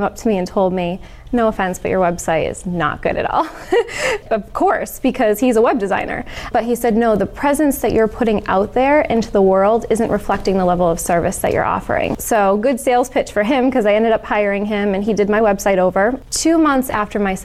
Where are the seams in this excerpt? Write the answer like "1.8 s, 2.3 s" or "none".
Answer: 12.2 s, 16.2 s